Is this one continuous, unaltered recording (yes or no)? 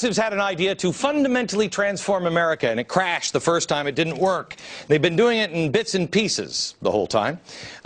no